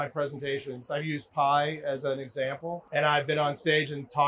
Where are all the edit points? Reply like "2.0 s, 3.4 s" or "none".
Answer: 2.8 s